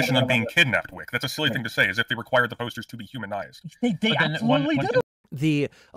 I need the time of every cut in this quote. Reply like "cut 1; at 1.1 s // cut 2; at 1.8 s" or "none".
cut 1; at 5.0 s